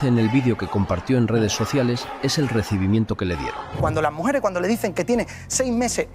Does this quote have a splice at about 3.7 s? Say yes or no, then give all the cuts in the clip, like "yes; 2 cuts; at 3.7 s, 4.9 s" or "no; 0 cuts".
yes; 1 cut; at 3.7 s